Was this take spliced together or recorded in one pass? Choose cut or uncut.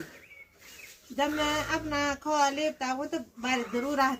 uncut